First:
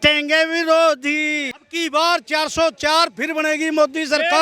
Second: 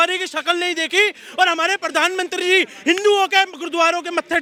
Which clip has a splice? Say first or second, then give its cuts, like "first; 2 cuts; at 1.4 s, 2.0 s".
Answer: first; 1 cut; at 1.6 s